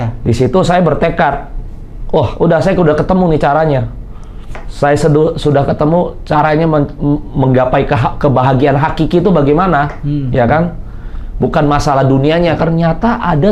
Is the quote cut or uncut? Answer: uncut